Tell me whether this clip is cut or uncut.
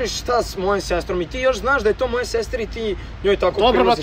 uncut